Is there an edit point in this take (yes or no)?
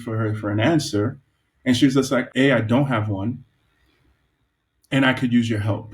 yes